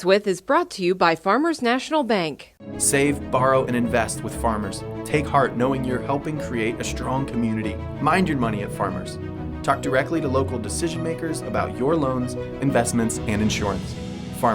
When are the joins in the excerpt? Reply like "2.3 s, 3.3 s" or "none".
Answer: none